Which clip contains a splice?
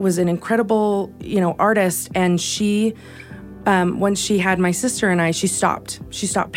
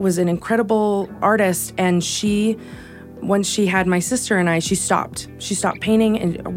second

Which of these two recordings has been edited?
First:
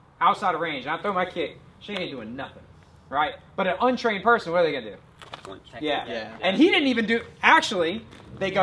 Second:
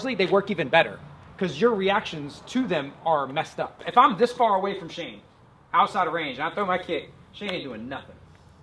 second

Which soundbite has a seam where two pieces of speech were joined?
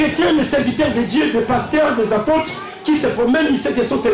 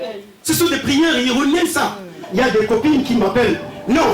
second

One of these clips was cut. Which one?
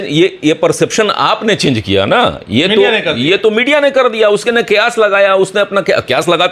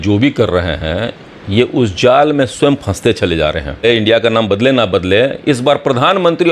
second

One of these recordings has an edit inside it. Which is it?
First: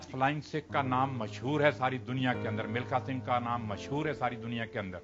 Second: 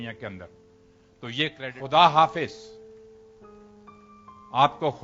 second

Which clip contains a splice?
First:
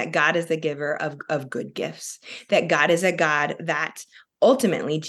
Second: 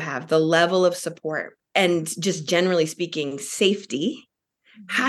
second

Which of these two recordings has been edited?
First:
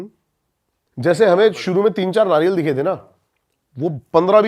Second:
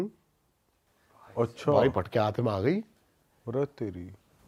first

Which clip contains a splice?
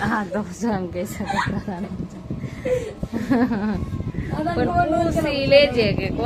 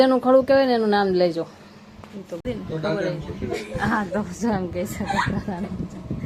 second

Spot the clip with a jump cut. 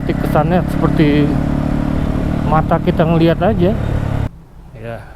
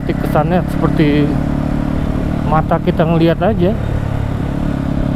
first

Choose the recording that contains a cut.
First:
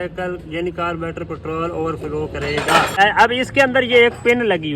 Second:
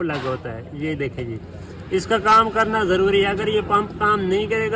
first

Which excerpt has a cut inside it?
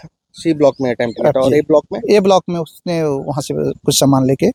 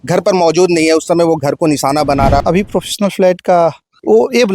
second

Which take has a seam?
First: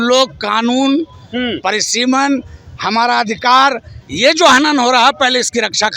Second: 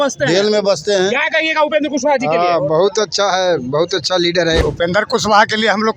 second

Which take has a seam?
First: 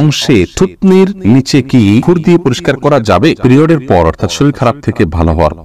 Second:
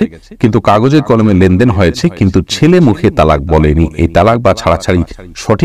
first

